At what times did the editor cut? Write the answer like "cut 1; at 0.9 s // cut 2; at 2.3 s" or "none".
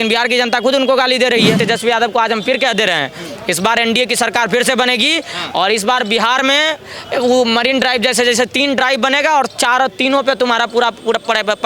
cut 1; at 1.6 s